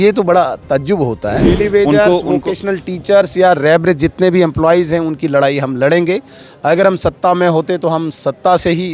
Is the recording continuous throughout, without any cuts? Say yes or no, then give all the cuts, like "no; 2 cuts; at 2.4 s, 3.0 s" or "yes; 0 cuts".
no; 1 cut; at 1.6 s